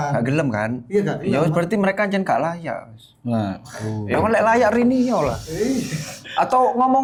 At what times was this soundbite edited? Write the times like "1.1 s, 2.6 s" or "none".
none